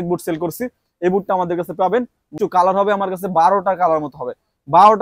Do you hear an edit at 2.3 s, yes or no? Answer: yes